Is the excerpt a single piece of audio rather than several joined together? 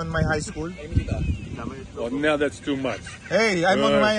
yes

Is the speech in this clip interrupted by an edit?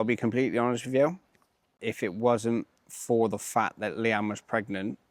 yes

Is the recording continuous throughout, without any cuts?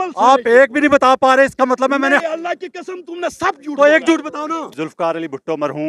no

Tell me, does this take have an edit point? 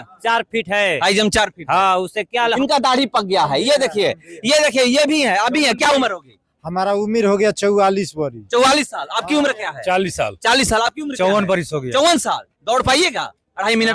yes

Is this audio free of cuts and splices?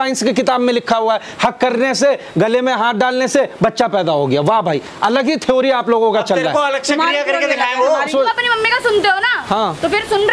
no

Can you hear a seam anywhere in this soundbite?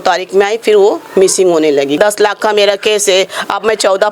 yes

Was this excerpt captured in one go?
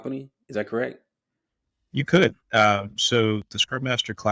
yes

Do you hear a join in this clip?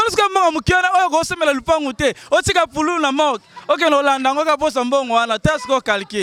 no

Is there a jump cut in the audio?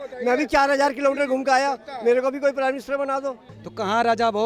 yes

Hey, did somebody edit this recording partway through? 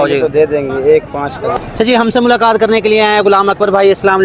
yes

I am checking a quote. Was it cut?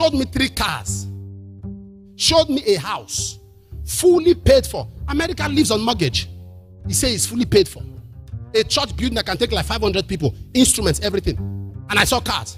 yes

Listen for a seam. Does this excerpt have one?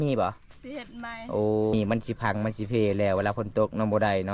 yes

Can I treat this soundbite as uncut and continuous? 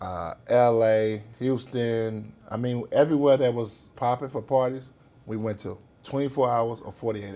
no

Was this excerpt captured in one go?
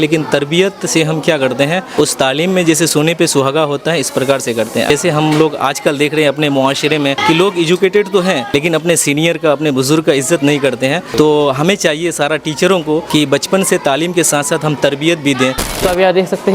no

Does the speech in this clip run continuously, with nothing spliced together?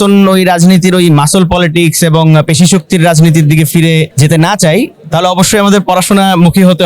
no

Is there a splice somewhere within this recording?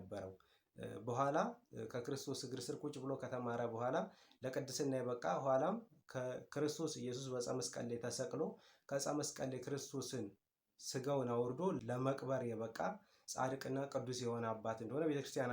yes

